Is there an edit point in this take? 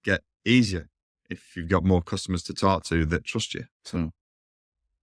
no; 0 cuts

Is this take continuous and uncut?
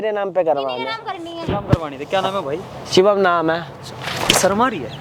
yes; 0 cuts

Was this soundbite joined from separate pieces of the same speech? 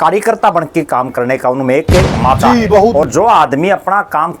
yes; 1 cut; at 3.0 s

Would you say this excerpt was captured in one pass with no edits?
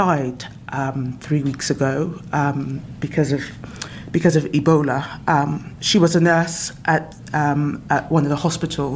yes; 0 cuts

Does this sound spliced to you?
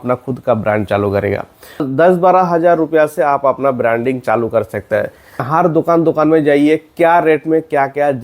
yes; 2 cuts; at 1.9 s, 5.5 s

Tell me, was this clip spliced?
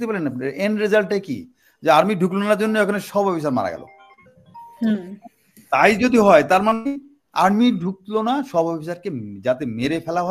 no; 0 cuts

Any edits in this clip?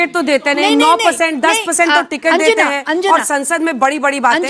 no; 0 cuts

